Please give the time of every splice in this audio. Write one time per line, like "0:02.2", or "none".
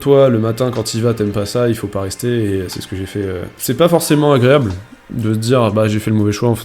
0:03.6